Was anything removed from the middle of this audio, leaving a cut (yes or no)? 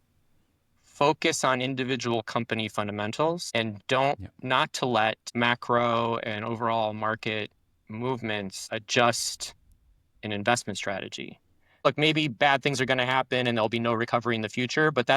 yes